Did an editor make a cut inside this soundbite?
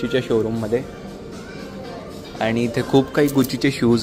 no; 0 cuts

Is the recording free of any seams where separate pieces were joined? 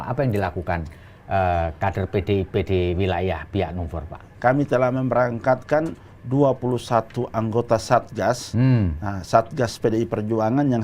no; 1 cut; at 4.2 s

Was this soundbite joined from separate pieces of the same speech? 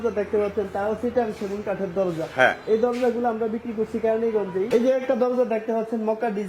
yes; 1 cut; at 4.7 s

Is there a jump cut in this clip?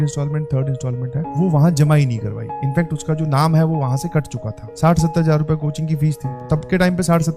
yes; 2 cuts; at 4.6 s, 6.4 s

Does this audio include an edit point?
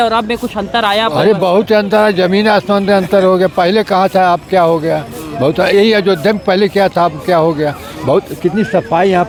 no; 0 cuts

